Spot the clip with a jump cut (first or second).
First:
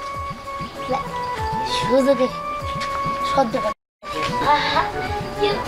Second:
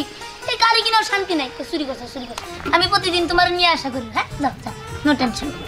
second